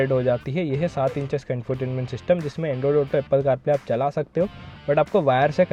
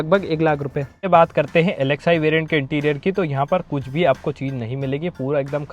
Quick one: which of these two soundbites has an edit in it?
second; 1 cut; at 1.0 s

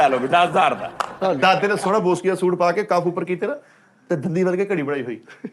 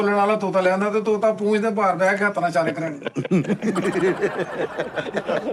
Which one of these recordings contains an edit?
first; 1 cut; at 1.2 s

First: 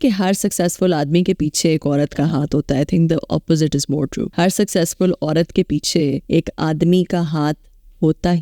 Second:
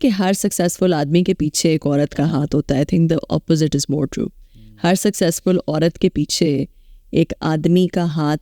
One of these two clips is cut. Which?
first; 2 cuts; at 4.2 s, 6.2 s

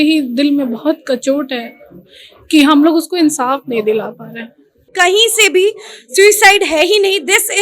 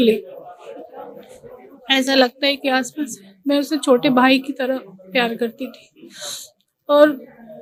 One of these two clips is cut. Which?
first; 1 cut; at 4.9 s

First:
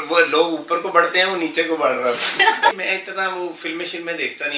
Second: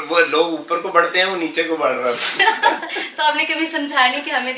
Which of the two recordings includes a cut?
first; 1 cut; at 2.7 s

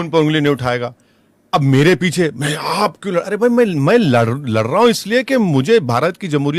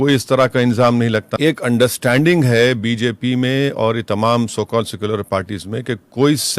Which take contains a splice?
second; 1 cut; at 1.3 s

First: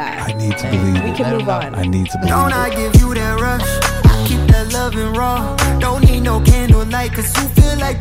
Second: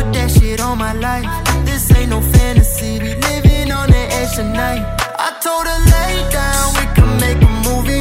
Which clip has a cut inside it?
first; 1 cut; at 2.3 s

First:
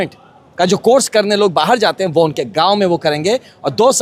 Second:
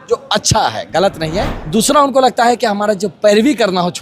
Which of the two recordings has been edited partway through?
second; 1 cut; at 1.6 s

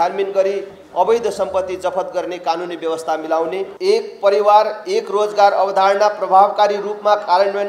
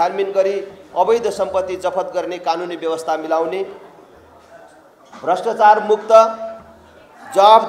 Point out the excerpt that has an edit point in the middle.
first; 1 cut; at 3.7 s

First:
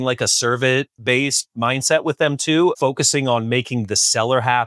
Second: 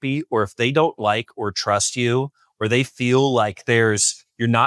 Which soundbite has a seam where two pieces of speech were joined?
first; 2 cuts; at 0.9 s, 2.7 s

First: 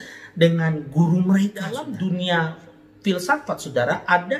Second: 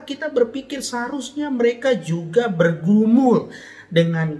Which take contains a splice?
first; 1 cut; at 1.9 s

